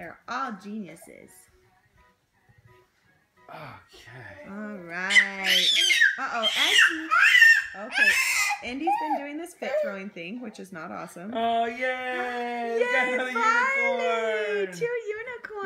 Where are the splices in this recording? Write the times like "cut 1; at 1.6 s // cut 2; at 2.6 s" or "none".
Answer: none